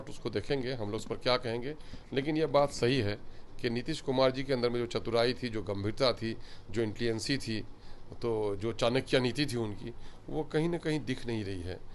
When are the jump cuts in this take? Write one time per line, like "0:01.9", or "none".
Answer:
none